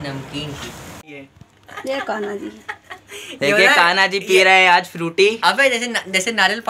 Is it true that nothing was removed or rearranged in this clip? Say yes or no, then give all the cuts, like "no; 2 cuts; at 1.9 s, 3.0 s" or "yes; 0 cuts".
no; 1 cut; at 1.1 s